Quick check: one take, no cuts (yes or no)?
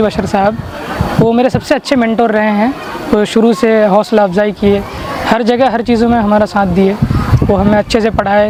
yes